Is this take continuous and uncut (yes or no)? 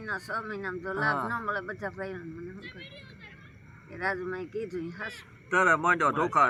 yes